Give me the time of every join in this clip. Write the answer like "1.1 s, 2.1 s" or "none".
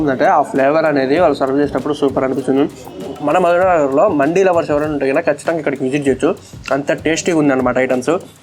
2.8 s

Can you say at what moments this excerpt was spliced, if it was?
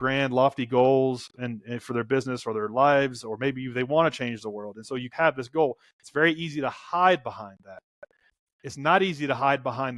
none

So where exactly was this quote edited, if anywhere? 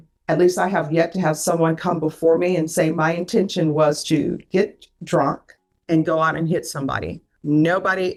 none

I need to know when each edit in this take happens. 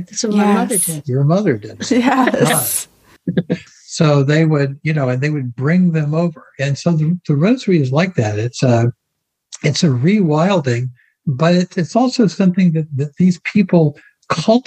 none

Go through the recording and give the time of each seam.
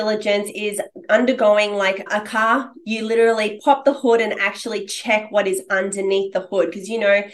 2.0 s

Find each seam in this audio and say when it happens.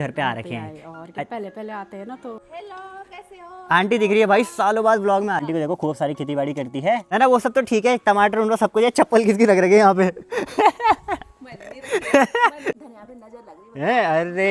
2.5 s, 5.4 s, 7.0 s, 12.8 s

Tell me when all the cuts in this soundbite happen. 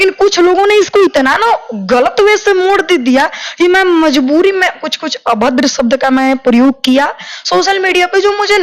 none

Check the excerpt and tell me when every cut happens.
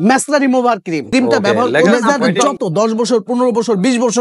2.4 s

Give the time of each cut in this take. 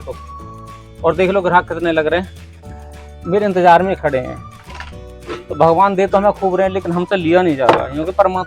none

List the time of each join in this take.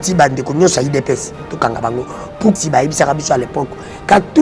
2.6 s

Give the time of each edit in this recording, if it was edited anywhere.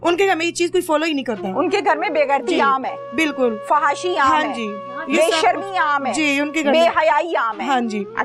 none

